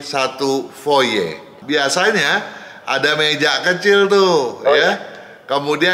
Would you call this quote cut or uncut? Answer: cut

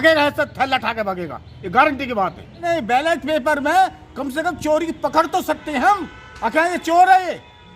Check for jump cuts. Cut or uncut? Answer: cut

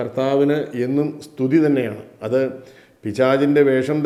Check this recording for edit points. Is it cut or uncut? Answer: uncut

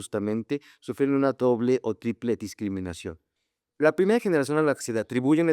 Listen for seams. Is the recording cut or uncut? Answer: cut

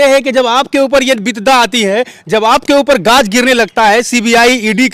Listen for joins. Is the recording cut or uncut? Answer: uncut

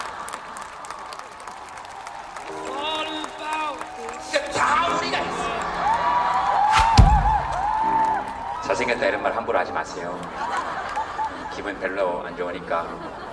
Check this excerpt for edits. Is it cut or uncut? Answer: cut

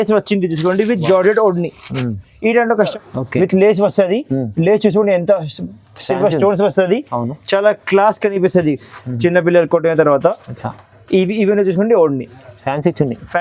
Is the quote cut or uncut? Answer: cut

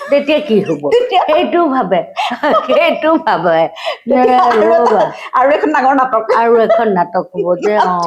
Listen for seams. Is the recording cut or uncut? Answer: uncut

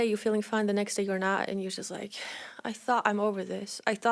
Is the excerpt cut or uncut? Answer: uncut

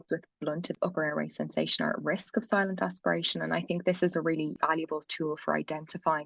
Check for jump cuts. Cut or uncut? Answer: cut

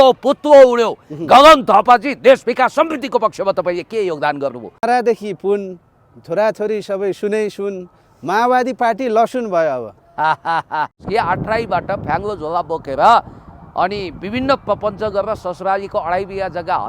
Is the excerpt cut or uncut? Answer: cut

